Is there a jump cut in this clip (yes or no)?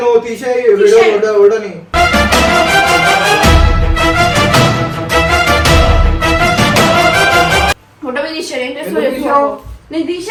no